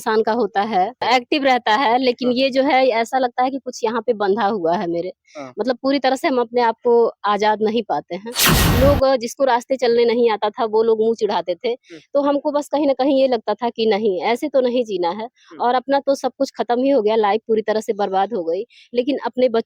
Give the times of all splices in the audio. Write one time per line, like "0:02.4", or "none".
0:01.0
0:08.6